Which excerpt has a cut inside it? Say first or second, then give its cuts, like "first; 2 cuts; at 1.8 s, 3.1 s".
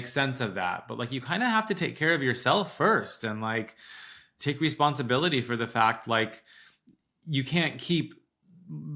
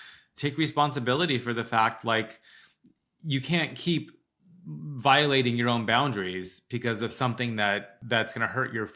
second; 1 cut; at 7.9 s